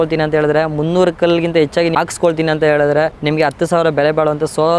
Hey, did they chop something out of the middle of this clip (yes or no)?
yes